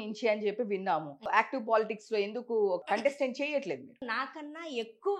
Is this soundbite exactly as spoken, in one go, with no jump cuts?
no; 3 cuts; at 1.3 s, 2.8 s, 4.1 s

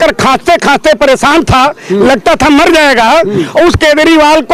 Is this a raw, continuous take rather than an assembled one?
yes; 0 cuts

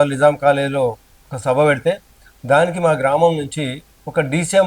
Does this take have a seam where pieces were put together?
no; 0 cuts

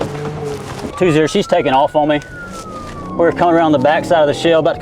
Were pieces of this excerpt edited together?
yes; 1 cut; at 0.9 s

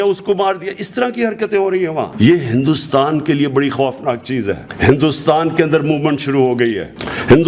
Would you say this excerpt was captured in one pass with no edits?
no; 1 cut; at 4.6 s

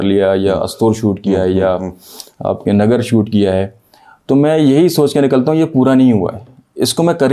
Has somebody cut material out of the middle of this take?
no; 0 cuts

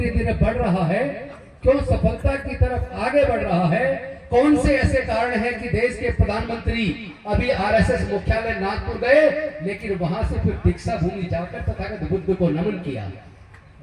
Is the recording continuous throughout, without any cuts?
yes; 0 cuts

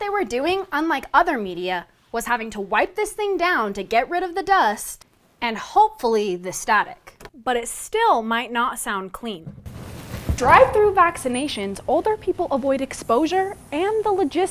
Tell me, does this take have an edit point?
yes; 1 cut; at 10.3 s

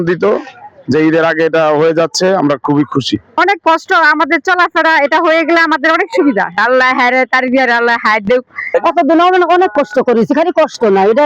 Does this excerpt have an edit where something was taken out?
yes; 3 cuts; at 3.3 s, 6.6 s, 8.6 s

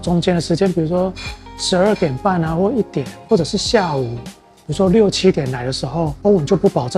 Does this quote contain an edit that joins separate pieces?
no; 0 cuts

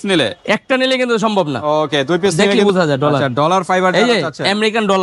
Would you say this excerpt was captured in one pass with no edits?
no; 1 cut; at 2.5 s

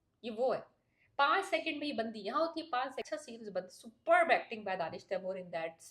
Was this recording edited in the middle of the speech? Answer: yes; 1 cut; at 3.0 s

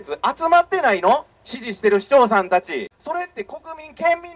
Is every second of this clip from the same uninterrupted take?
no; 1 cut; at 2.9 s

